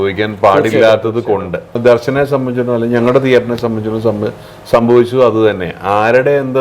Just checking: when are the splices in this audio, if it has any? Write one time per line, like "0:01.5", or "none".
0:01.8